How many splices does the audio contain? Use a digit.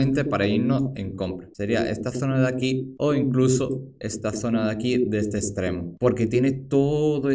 1